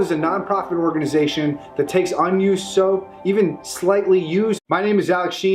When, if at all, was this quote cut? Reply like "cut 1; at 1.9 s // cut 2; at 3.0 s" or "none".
none